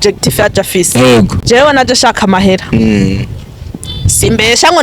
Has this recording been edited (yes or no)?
yes